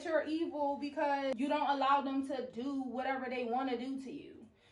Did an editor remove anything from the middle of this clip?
yes; 1 cut; at 1.3 s

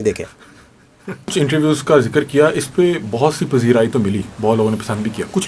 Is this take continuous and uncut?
no; 1 cut; at 1.3 s

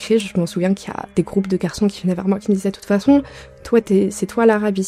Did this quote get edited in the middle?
no; 0 cuts

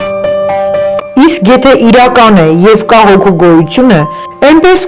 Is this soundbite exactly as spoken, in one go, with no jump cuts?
yes; 0 cuts

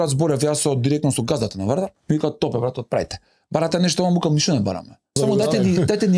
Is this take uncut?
no; 2 cuts; at 2.0 s, 5.1 s

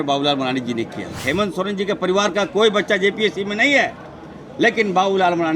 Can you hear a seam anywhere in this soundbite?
yes; 1 cut; at 1.2 s

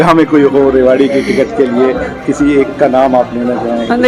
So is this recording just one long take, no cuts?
yes; 0 cuts

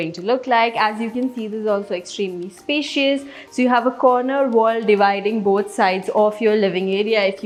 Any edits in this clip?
no; 0 cuts

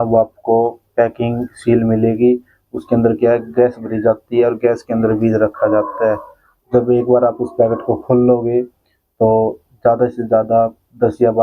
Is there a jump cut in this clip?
no; 0 cuts

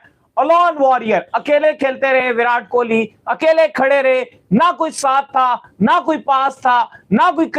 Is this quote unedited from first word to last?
yes; 0 cuts

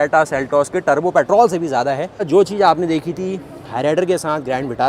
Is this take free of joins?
no; 1 cut; at 2.2 s

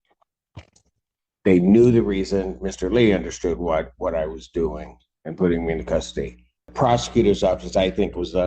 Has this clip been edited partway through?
yes; 1 cut; at 6.7 s

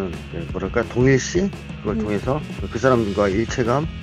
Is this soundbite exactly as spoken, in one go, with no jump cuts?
yes; 0 cuts

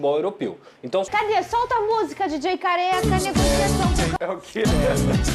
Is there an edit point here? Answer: yes; 2 cuts; at 1.1 s, 4.1 s

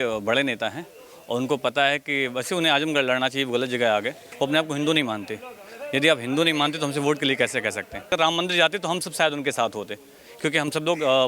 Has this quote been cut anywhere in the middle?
yes; 2 cuts; at 4.3 s, 8.1 s

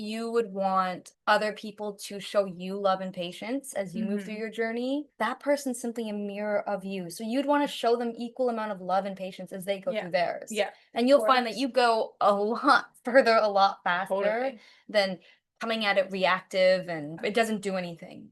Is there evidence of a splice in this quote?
yes; 2 cuts; at 1.1 s, 17.2 s

